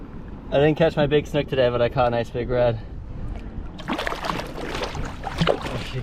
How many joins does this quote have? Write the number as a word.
zero